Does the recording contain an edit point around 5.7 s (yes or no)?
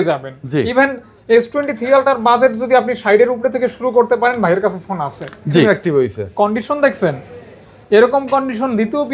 yes